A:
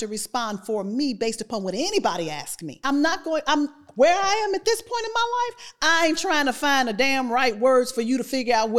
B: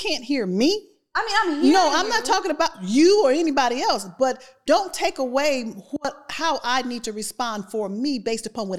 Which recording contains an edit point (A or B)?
A